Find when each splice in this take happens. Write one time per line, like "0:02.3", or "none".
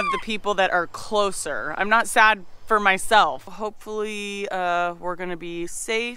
0:03.5